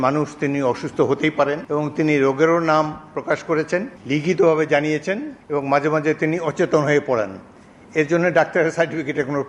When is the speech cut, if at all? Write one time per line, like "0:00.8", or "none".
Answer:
0:01.6
0:04.0
0:05.3